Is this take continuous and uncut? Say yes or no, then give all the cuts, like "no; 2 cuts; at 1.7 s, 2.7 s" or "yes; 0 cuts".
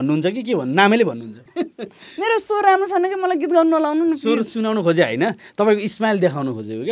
no; 1 cut; at 1.4 s